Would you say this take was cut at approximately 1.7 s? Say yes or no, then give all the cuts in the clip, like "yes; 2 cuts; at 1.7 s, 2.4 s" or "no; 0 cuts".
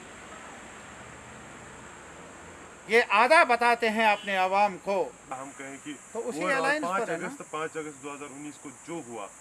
no; 1 cut; at 5.2 s